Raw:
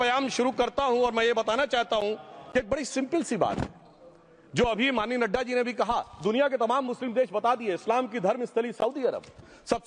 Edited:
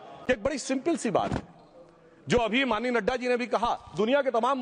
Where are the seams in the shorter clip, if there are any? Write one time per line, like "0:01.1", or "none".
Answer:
none